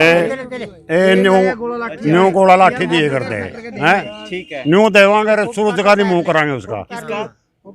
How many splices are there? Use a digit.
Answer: 0